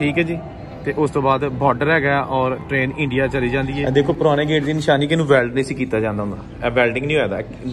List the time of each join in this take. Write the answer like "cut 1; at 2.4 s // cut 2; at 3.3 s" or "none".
cut 1; at 3.8 s